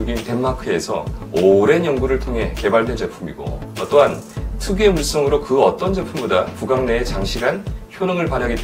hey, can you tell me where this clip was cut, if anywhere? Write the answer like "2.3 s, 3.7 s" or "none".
1.2 s